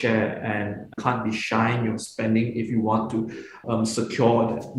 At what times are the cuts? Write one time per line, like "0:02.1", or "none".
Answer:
0:01.0
0:03.6